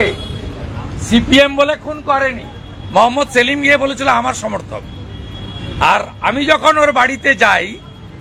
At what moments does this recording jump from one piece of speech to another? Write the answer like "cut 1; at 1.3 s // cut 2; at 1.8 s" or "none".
none